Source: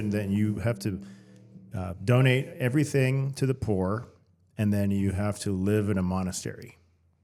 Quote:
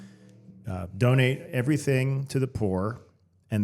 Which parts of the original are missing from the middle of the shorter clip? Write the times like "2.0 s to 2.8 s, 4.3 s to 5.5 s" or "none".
none